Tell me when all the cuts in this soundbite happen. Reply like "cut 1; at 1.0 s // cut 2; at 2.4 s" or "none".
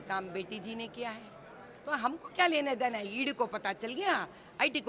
none